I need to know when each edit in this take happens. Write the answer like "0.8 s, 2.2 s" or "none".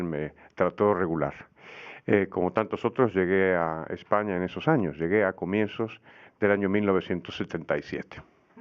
2.4 s